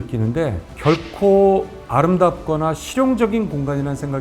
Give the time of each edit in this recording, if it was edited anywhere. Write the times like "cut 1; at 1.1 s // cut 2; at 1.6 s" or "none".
none

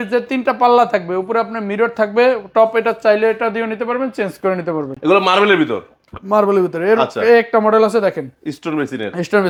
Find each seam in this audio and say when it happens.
none

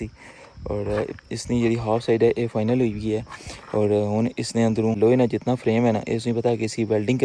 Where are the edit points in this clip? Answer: cut 1; at 5.0 s

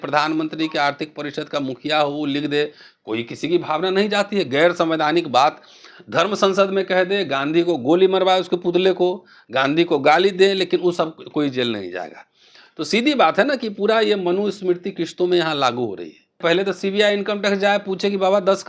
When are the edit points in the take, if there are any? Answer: cut 1; at 16.4 s

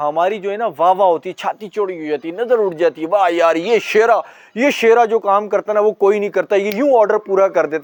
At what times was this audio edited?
none

